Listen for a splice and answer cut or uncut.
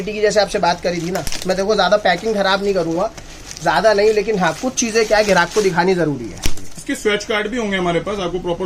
uncut